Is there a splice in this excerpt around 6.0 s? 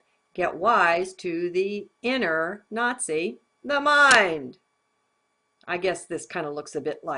no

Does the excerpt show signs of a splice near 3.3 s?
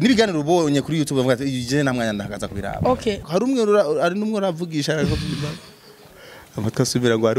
yes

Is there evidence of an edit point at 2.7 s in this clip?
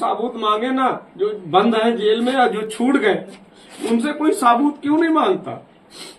no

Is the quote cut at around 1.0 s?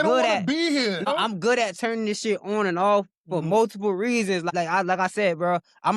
yes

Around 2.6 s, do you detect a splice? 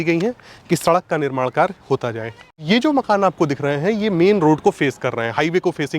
yes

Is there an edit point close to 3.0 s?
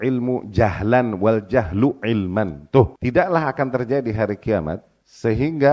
yes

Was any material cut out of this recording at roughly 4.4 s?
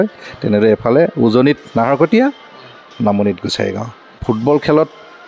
yes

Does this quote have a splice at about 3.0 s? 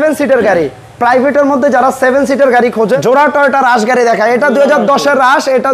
yes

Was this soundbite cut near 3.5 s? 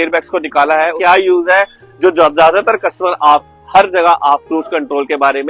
no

